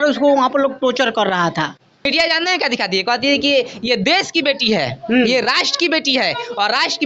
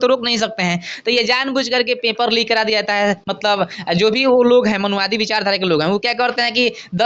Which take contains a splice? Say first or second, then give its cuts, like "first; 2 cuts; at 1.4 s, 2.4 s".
first; 1 cut; at 2.1 s